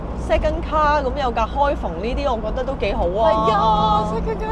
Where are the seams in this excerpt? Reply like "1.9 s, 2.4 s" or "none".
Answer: none